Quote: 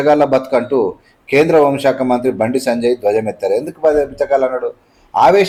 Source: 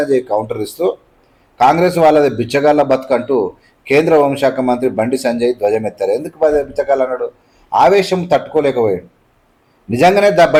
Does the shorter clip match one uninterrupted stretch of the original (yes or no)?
yes